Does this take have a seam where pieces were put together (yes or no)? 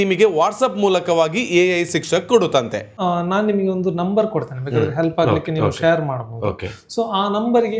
yes